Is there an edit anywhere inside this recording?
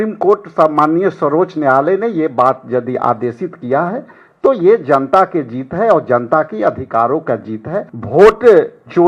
yes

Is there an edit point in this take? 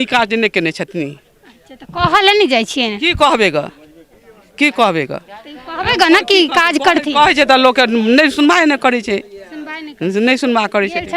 no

